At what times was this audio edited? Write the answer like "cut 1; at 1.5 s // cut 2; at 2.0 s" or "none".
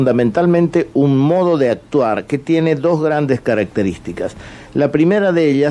cut 1; at 2.1 s

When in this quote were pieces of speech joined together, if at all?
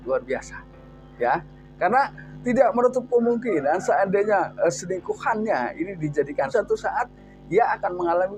cut 1; at 6.5 s

